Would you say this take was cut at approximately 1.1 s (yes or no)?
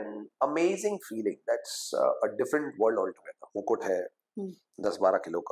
no